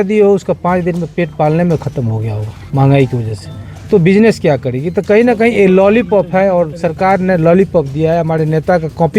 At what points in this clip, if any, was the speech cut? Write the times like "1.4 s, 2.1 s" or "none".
none